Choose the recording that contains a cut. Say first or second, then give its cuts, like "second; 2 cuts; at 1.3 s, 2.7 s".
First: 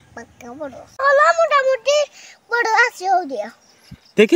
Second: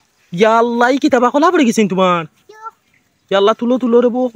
first; 1 cut; at 1.0 s